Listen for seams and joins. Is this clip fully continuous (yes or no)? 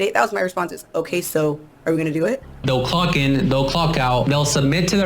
no